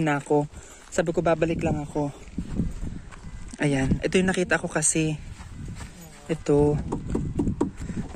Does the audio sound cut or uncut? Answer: uncut